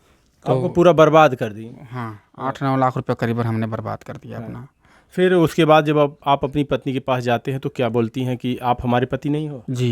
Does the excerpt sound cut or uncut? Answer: uncut